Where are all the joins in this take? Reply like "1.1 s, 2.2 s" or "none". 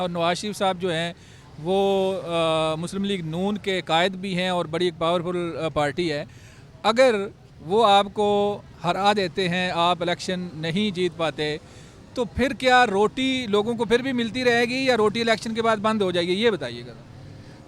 none